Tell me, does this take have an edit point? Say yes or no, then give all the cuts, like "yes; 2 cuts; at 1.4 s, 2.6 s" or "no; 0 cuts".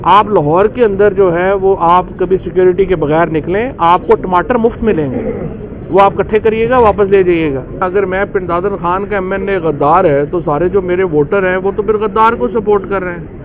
yes; 1 cut; at 7.8 s